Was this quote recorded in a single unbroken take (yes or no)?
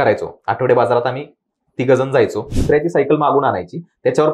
no